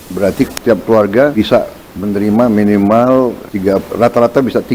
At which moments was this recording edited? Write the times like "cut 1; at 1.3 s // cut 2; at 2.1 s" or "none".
cut 1; at 1.3 s // cut 2; at 3.5 s